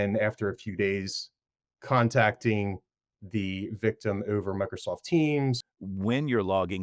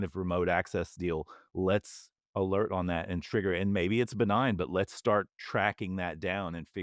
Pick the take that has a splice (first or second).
first